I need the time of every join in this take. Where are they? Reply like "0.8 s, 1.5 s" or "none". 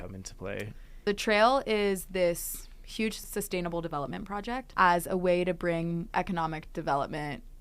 1.0 s, 3.3 s, 4.7 s, 6.1 s